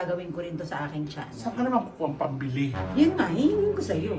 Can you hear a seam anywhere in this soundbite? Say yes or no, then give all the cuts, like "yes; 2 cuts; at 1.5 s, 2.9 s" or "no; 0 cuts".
no; 0 cuts